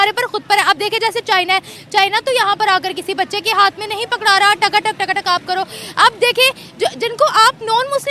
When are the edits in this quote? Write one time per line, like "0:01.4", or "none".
none